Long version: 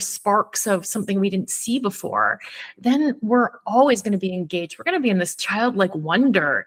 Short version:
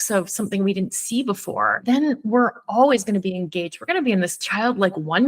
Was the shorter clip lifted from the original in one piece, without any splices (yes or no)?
no